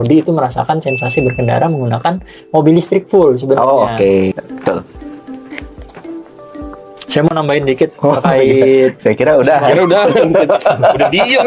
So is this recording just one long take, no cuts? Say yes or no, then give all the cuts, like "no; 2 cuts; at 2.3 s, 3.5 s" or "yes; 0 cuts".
no; 1 cut; at 4.3 s